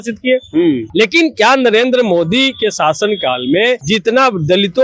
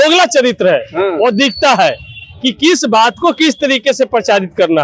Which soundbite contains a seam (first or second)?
first